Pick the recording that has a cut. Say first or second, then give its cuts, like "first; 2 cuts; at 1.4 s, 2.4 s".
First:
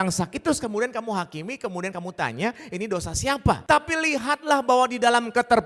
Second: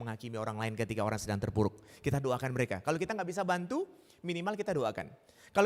first; 1 cut; at 3.6 s